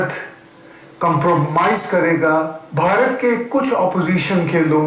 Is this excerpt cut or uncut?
cut